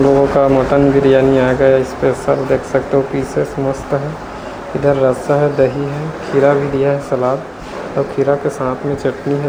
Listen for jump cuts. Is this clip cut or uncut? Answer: uncut